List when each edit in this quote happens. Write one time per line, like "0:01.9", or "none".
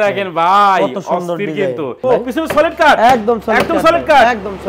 0:02.0